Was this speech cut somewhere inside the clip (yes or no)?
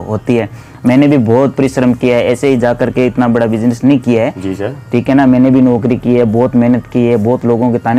no